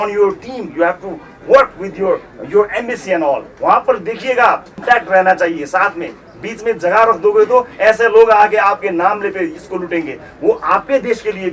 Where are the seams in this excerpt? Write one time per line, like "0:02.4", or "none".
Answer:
0:04.7